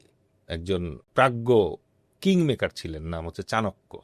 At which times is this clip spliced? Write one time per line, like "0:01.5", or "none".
0:01.0